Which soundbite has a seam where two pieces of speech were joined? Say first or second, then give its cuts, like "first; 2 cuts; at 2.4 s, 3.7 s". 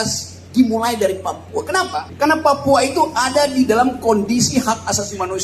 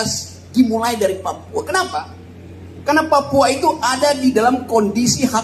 first; 1 cut; at 2.1 s